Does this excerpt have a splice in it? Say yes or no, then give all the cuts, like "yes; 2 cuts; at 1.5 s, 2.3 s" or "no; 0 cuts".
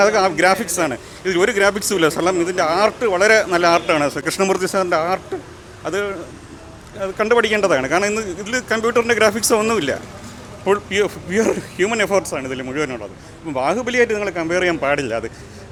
no; 0 cuts